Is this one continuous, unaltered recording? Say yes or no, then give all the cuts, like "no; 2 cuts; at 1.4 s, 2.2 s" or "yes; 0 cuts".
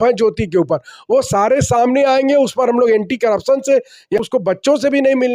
no; 1 cut; at 4.2 s